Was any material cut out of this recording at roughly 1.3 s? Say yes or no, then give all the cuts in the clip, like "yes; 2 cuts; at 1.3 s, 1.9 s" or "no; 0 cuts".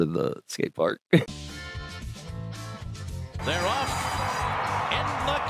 yes; 1 cut; at 1.3 s